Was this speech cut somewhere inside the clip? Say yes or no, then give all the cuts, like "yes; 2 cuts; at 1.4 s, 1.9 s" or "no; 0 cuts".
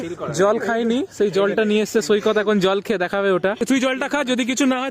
yes; 1 cut; at 3.6 s